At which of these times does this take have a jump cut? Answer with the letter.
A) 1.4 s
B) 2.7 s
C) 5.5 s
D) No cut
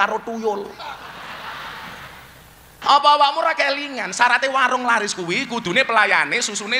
B